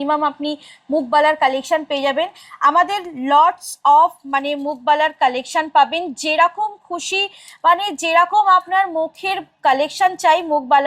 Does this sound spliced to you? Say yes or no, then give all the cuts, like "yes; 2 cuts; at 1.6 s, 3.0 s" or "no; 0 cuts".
no; 0 cuts